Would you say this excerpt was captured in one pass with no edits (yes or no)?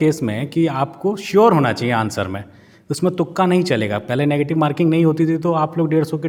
yes